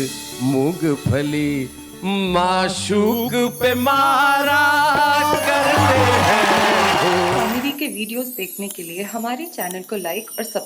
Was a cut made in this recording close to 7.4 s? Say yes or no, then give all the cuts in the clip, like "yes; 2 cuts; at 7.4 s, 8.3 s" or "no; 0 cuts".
yes; 1 cut; at 7.4 s